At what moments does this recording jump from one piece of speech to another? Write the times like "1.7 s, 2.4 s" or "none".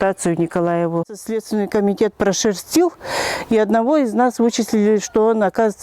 1.2 s